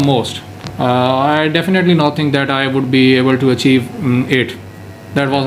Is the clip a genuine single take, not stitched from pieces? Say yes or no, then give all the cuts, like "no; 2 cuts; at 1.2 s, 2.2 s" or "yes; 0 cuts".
yes; 0 cuts